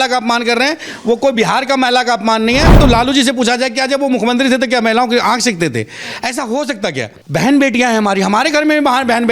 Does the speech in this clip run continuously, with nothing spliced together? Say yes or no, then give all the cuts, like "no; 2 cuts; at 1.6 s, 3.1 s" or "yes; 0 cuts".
no; 2 cuts; at 2.8 s, 7.2 s